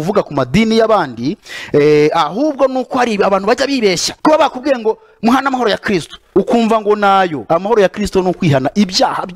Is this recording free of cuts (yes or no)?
no